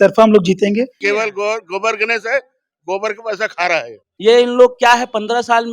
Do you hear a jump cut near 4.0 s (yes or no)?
yes